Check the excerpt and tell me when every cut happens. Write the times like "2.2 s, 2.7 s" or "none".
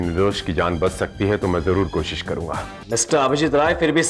2.8 s

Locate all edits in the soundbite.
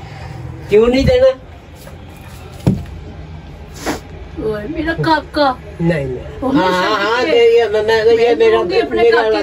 none

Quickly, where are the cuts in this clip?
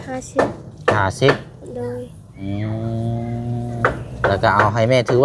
3.8 s

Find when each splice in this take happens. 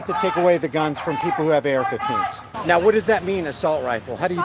2.5 s

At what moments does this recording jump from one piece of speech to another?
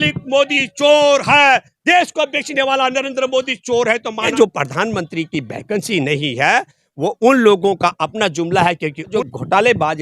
4.3 s, 9.1 s

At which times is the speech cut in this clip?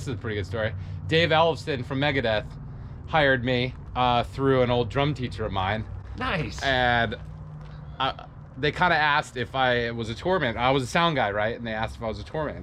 none

